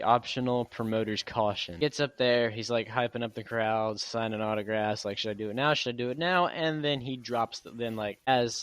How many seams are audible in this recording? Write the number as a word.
one